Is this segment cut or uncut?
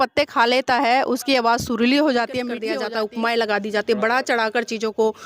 cut